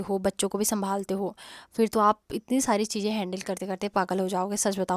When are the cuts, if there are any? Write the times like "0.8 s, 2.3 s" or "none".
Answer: none